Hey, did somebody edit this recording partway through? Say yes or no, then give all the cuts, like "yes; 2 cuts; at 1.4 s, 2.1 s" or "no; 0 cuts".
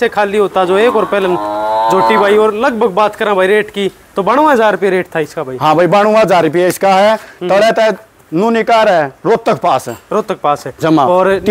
no; 0 cuts